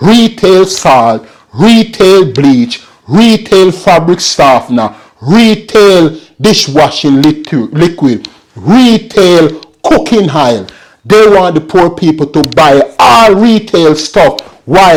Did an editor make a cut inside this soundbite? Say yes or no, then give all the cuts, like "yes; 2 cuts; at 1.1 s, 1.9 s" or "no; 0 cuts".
no; 0 cuts